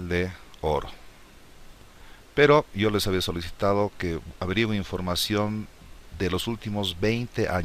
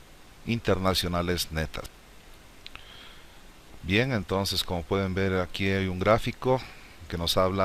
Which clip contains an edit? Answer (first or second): first